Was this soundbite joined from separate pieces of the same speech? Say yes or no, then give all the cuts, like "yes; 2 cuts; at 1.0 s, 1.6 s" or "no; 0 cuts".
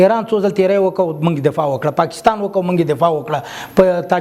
no; 0 cuts